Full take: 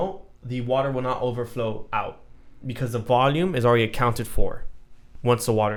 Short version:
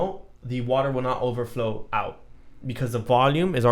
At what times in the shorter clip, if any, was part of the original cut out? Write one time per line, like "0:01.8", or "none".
none